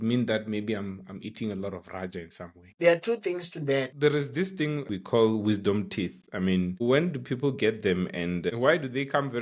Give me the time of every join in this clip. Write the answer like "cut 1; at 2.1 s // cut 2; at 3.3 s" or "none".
cut 1; at 2.7 s // cut 2; at 3.9 s // cut 3; at 4.9 s